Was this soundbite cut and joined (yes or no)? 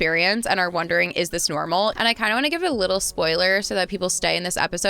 yes